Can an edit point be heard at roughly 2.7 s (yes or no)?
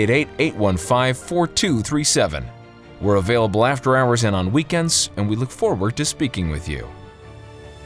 no